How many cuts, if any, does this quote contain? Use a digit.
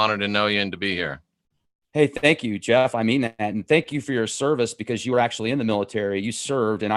1